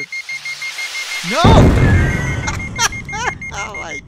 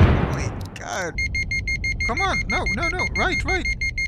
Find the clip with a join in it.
second; 1 cut; at 1.1 s

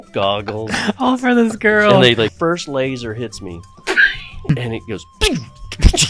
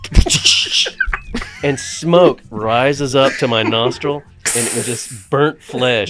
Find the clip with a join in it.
first; 2 cuts; at 2.3 s, 4.5 s

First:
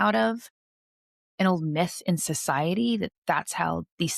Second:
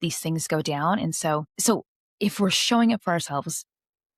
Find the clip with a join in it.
second; 1 cut; at 1.5 s

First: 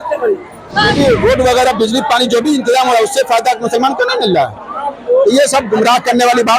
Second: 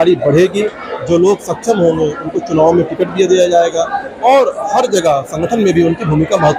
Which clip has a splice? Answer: first; 1 cut; at 0.9 s

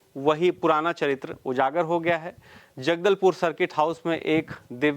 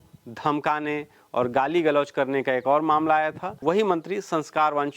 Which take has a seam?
second; 1 cut; at 3.5 s

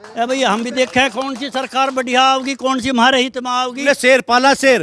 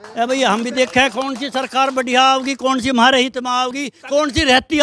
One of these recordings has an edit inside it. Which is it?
first; 1 cut; at 3.8 s

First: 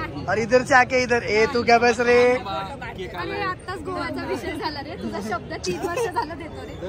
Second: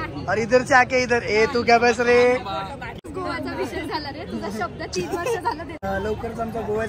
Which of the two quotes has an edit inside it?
second; 2 cuts; at 3.0 s, 5.8 s

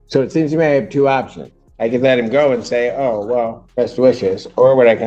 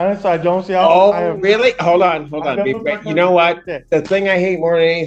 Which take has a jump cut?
first; 1 cut; at 3.6 s

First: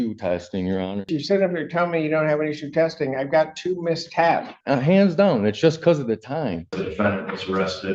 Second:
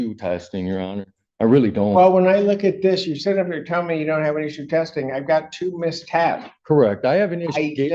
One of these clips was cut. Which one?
first; 3 cuts; at 1.1 s, 4.5 s, 6.8 s

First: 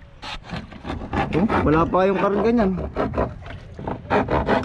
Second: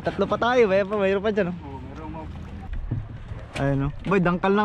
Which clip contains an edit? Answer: second; 1 cut; at 2.6 s

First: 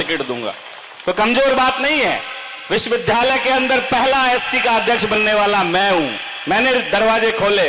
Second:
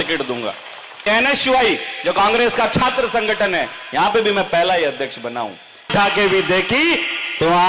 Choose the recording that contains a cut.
second; 2 cuts; at 1.1 s, 5.9 s

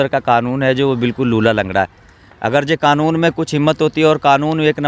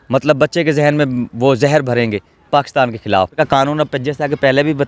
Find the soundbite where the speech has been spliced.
second; 1 cut; at 3.3 s

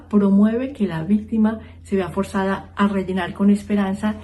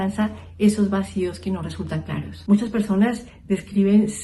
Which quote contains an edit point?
second; 1 cut; at 2.3 s

